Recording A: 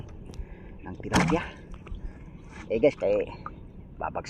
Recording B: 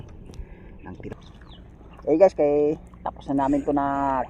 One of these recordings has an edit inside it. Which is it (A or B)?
B